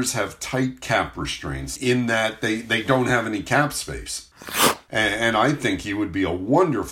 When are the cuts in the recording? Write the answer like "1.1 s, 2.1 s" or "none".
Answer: 1.7 s, 4.4 s